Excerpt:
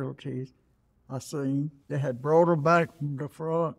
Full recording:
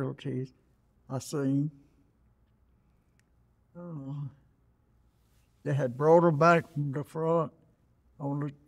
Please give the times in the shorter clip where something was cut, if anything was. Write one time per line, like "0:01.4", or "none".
0:01.8